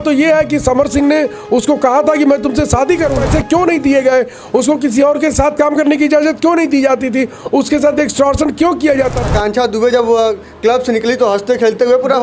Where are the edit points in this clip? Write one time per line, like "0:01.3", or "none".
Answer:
0:03.2
0:09.2